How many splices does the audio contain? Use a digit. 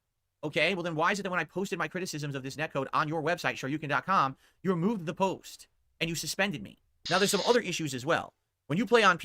1